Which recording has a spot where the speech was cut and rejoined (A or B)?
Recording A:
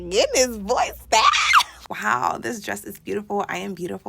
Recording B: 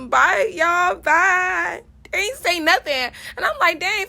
A